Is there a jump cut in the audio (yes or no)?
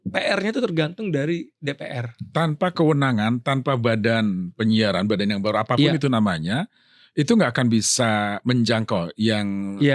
no